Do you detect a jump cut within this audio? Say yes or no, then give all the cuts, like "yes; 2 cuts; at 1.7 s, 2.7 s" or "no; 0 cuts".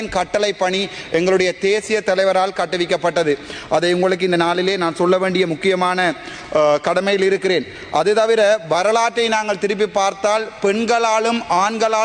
no; 0 cuts